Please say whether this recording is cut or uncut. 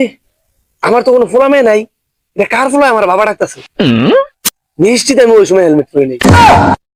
uncut